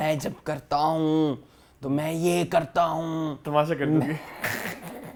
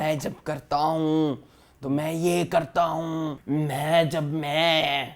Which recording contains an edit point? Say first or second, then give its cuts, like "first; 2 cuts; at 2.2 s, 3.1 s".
second; 1 cut; at 3.4 s